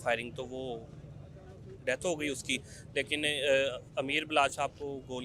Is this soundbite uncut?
yes; 0 cuts

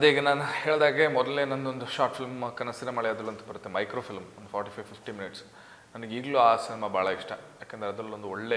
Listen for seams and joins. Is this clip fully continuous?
yes; 0 cuts

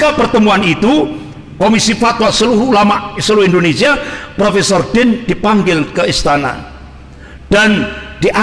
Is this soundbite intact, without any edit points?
yes; 0 cuts

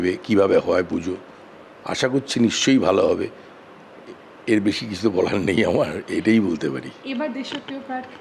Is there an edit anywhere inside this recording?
no; 0 cuts

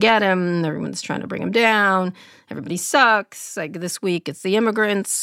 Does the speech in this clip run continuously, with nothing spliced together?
yes; 0 cuts

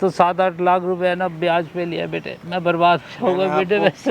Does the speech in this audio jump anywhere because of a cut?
yes; 1 cut; at 2.4 s

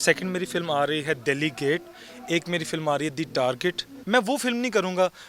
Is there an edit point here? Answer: yes; 1 cut; at 3.9 s

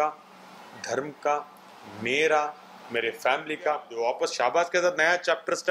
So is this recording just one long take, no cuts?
no; 1 cut; at 3.9 s

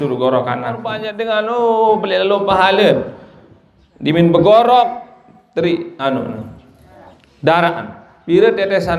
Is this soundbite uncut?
no; 1 cut; at 1.1 s

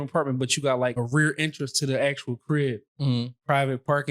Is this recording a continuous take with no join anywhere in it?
no; 1 cut; at 0.9 s

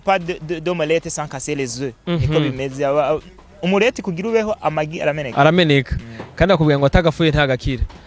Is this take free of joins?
yes; 0 cuts

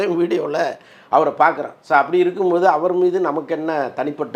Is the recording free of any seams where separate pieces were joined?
yes; 0 cuts

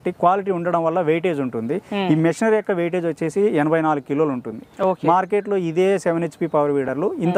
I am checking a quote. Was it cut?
no; 0 cuts

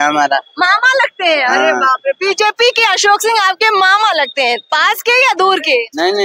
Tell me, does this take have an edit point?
no; 0 cuts

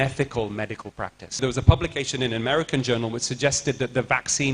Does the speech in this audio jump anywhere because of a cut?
yes; 1 cut; at 1.4 s

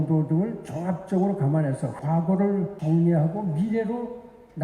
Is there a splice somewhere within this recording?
yes; 2 cuts; at 2.0 s, 2.8 s

